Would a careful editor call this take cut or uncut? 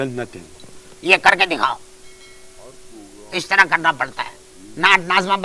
uncut